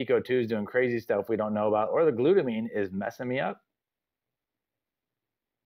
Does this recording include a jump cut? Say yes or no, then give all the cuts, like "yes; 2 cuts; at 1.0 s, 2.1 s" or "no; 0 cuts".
no; 0 cuts